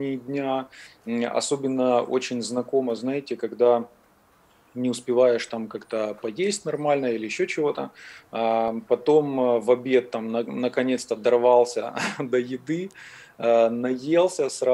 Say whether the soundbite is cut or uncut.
uncut